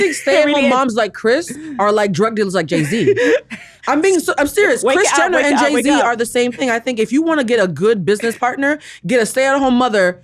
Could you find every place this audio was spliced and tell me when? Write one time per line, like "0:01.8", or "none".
none